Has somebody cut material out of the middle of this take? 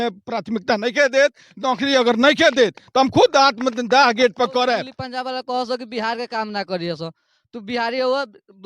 yes; 1 cut; at 5.0 s

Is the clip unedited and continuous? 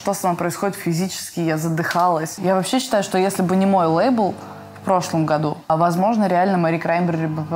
no; 2 cuts; at 2.3 s, 5.7 s

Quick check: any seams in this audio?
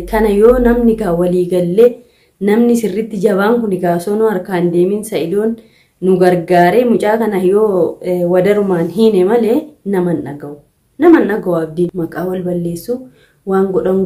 yes; 1 cut; at 11.9 s

